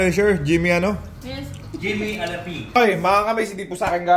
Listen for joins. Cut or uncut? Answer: cut